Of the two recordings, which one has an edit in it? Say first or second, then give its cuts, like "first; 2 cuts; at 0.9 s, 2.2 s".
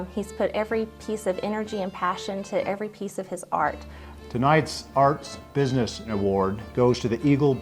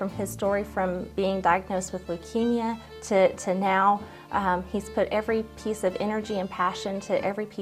first; 1 cut; at 3.9 s